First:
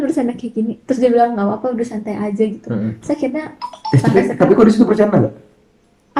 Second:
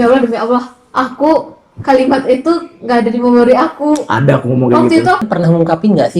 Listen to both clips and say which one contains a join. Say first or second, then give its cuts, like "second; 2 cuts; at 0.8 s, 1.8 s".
second; 1 cut; at 5.2 s